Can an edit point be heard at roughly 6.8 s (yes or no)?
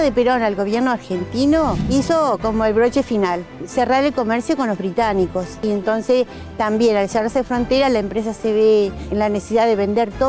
no